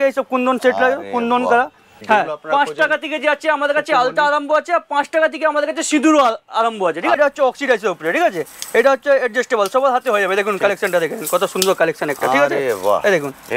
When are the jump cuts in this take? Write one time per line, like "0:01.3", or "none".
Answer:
0:01.9
0:07.2